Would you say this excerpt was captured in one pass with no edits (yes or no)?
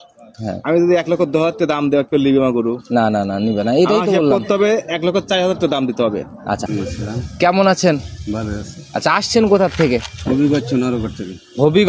no